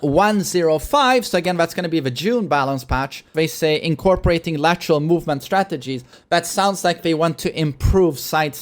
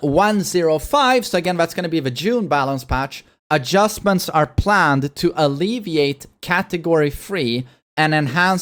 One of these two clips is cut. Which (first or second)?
first